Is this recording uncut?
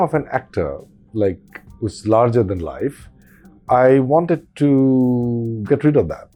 yes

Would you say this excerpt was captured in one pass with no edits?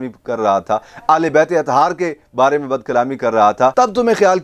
yes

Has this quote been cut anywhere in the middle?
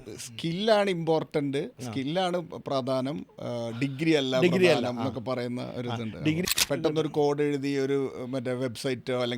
yes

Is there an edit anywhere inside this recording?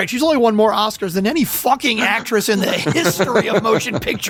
no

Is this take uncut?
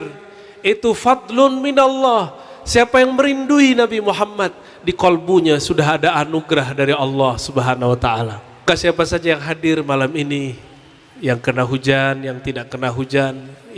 no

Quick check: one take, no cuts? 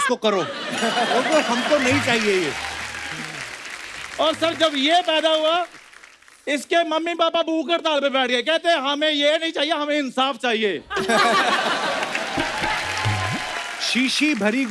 no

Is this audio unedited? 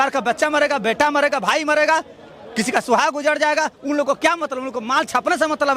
yes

